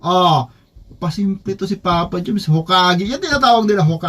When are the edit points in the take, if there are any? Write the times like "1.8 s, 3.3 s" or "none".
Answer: none